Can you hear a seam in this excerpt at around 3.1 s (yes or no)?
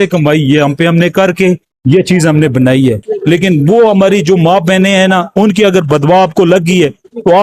yes